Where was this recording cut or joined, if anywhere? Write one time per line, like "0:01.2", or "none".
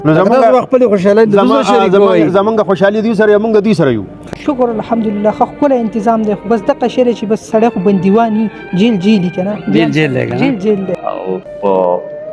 0:04.1
0:11.0